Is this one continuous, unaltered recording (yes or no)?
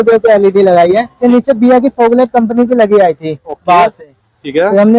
no